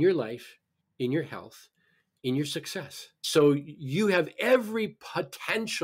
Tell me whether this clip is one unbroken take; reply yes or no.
no